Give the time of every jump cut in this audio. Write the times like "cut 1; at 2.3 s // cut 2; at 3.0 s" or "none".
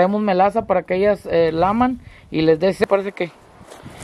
cut 1; at 2.8 s